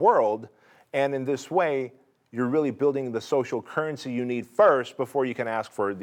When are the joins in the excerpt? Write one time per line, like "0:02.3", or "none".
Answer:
none